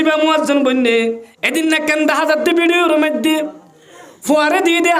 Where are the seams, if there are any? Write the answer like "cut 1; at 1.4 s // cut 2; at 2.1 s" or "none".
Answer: cut 1; at 1.3 s